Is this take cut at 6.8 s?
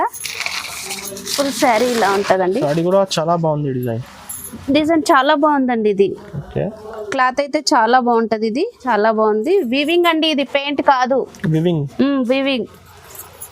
no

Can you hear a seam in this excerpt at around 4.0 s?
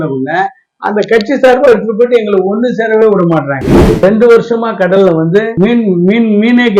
yes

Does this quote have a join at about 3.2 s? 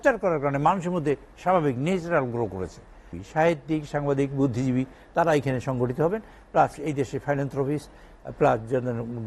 yes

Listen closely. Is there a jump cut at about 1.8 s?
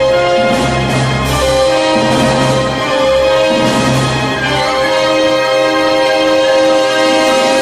no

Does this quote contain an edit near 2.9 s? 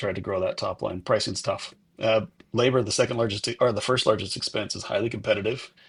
no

